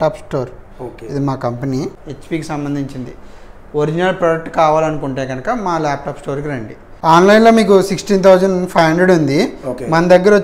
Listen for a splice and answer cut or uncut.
cut